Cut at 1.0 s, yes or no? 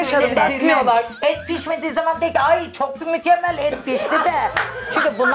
no